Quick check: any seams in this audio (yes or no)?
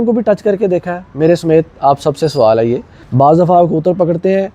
yes